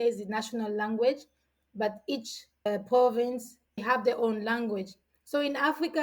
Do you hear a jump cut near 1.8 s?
no; 1 cut; at 3.8 s

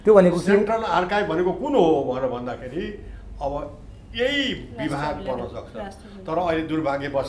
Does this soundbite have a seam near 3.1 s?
no; 0 cuts

